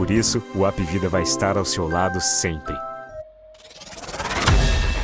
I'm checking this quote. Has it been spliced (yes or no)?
yes